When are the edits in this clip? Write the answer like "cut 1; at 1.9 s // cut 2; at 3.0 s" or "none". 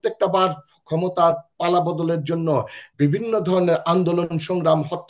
cut 1; at 2.8 s

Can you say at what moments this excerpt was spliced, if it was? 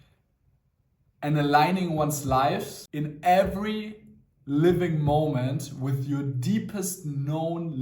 cut 1; at 2.8 s

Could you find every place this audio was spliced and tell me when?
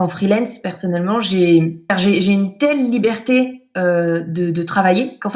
cut 1; at 1.9 s

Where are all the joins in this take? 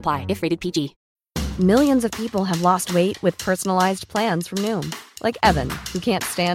cut 1; at 1.0 s

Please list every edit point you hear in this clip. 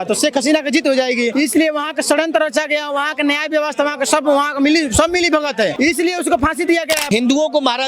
cut 1; at 1.3 s // cut 2; at 5.7 s // cut 3; at 7.0 s

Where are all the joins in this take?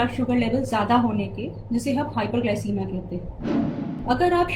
cut 1; at 3.6 s

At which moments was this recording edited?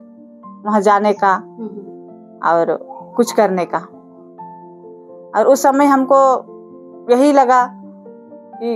none

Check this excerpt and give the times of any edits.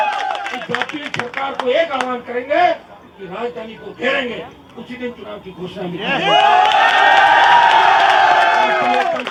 none

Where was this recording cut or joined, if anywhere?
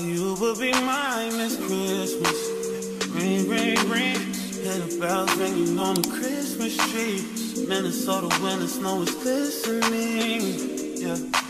none

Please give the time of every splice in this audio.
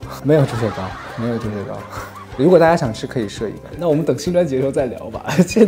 cut 1; at 3.6 s

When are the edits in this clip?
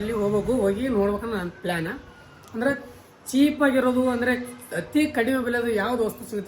none

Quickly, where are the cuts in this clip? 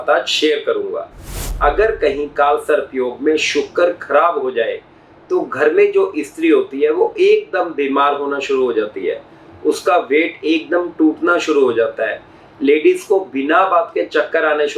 cut 1; at 1.3 s

